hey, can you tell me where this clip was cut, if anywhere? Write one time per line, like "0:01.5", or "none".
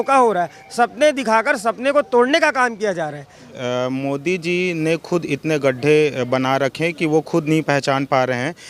0:03.6